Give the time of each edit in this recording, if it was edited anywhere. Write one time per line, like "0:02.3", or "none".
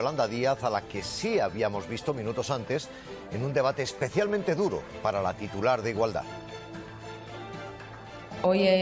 0:04.2
0:06.8